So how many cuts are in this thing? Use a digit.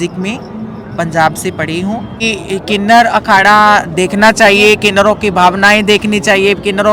1